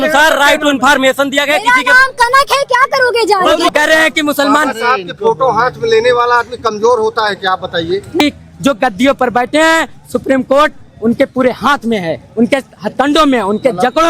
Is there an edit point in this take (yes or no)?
yes